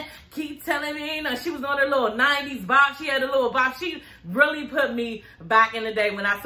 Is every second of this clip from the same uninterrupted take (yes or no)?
yes